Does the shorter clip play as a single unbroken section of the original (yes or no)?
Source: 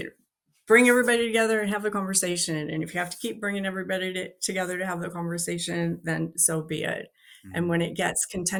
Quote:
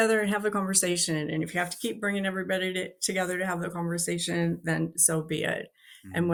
yes